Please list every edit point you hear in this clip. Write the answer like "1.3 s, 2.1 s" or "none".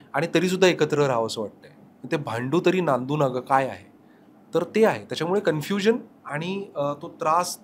none